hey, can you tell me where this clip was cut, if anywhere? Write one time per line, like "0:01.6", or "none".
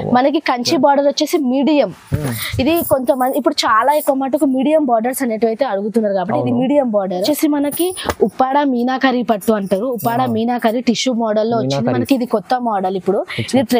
0:07.2

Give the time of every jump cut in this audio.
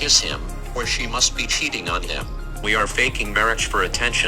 0:02.6

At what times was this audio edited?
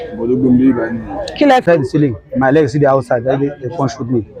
0:01.6

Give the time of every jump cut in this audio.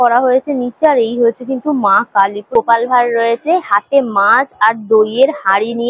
0:02.4

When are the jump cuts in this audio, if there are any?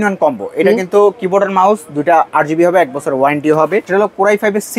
0:03.9

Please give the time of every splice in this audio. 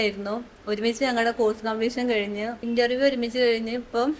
0:02.6

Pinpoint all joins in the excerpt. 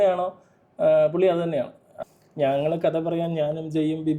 0:02.0

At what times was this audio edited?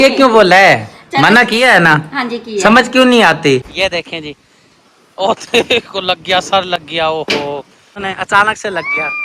0:03.7
0:08.0

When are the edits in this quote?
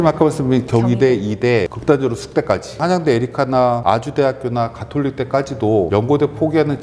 0:01.8
0:02.8
0:03.8
0:05.9

